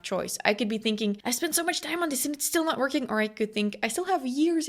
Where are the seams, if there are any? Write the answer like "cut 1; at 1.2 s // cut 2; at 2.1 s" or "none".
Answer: cut 1; at 1.2 s